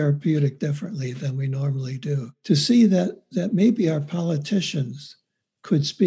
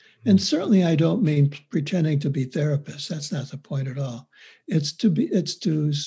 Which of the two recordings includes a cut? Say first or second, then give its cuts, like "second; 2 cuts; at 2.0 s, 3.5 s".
first; 1 cut; at 2.3 s